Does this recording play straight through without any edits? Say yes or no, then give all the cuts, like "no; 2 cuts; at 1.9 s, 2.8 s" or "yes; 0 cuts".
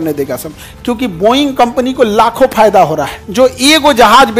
no; 1 cut; at 3.2 s